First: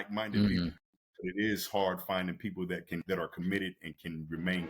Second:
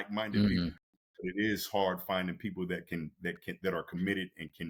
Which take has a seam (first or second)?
first